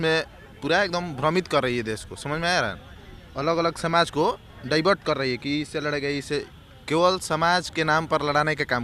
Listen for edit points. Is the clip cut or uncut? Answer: uncut